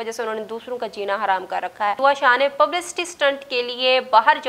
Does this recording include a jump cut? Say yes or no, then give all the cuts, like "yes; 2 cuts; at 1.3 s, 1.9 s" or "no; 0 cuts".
yes; 1 cut; at 2.0 s